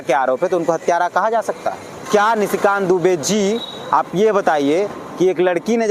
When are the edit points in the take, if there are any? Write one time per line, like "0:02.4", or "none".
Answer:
0:02.1